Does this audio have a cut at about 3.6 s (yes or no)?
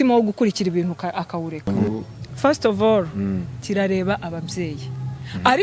no